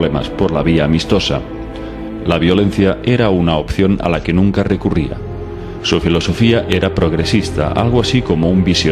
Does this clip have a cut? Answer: yes; 1 cut; at 6.9 s

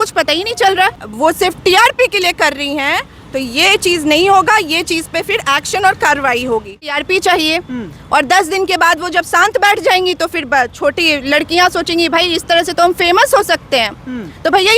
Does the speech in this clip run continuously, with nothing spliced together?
no; 2 cuts; at 1.0 s, 6.9 s

